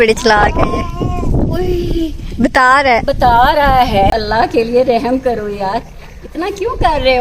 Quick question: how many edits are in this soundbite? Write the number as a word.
one